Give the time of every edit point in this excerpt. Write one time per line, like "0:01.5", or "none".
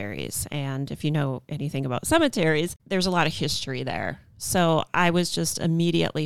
0:02.8